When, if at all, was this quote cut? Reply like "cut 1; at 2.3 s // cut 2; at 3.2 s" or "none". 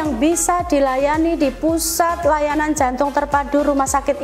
none